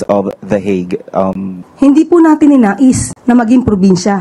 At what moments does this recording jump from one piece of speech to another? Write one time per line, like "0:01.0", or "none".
0:01.6